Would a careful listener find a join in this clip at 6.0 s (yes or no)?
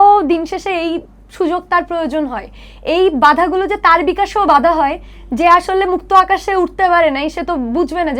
no